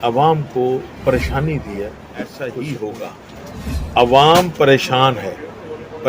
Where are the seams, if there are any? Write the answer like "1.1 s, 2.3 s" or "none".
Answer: 2.3 s